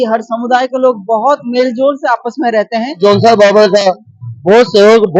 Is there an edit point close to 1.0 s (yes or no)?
no